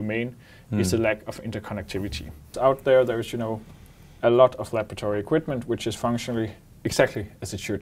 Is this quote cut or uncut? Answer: cut